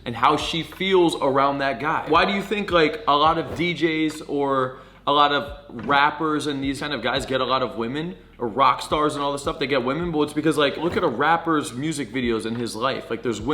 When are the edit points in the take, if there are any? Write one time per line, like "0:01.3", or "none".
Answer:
0:02.1
0:06.8
0:10.8

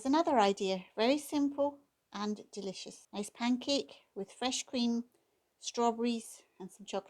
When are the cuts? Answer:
0:02.9

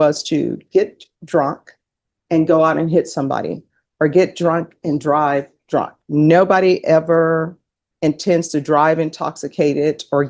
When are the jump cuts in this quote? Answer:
none

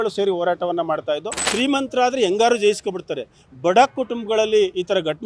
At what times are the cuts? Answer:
0:01.4

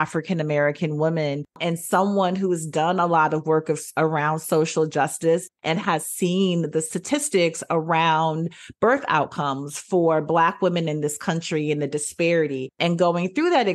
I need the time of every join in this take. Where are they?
0:01.6
0:12.7

